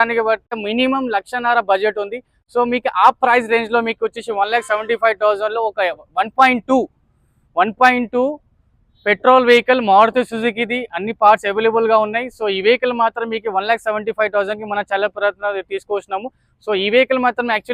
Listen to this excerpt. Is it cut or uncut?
uncut